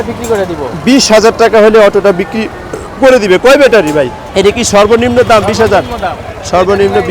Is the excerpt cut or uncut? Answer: cut